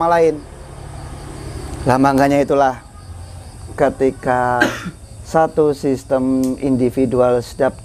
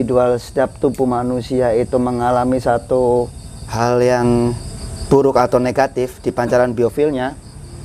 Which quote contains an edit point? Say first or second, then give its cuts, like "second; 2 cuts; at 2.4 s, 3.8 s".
second; 1 cut; at 3.6 s